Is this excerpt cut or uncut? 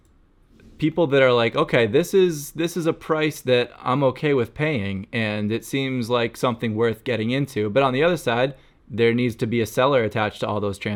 uncut